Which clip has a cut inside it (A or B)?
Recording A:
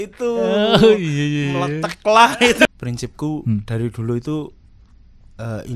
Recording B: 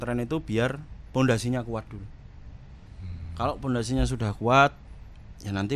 A